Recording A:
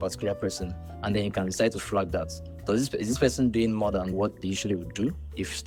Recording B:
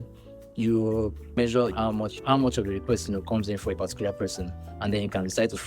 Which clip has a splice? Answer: B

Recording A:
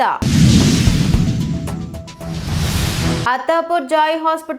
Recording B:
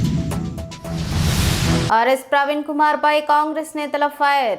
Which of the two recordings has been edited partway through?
B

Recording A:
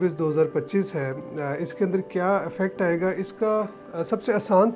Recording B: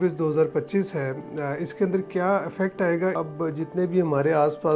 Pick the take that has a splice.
B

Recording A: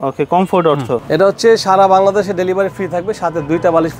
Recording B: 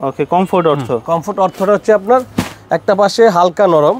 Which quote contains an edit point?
A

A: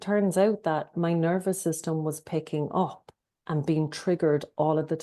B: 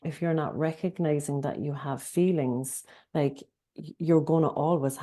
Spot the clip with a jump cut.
A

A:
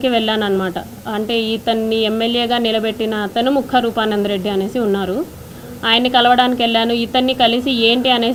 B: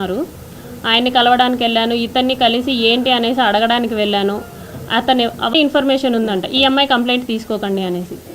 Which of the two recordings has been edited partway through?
B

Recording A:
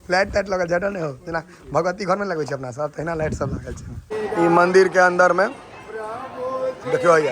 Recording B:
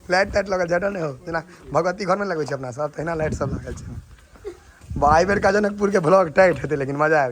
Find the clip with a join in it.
A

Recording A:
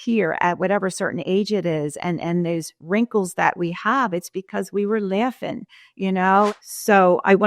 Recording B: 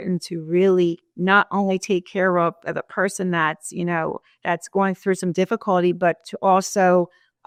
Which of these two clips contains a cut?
A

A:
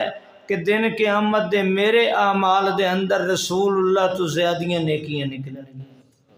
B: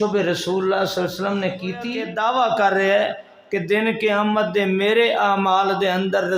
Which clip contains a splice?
B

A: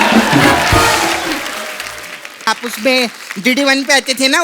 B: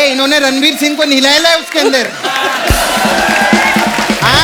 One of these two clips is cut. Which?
A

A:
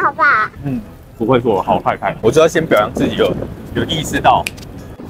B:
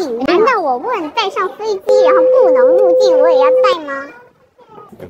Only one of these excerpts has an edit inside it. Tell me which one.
A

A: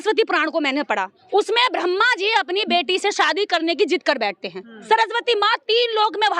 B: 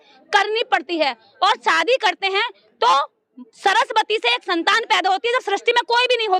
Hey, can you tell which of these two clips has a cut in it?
A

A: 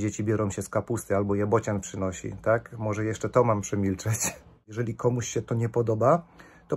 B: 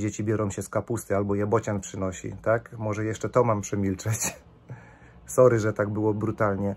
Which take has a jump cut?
A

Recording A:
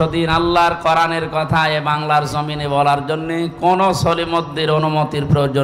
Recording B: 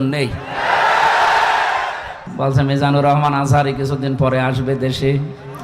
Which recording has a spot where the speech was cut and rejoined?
B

